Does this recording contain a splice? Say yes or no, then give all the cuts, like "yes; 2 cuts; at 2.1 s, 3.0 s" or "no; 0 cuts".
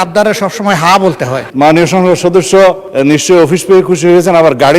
yes; 2 cuts; at 1.4 s, 2.9 s